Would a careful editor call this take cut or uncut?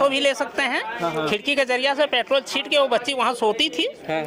uncut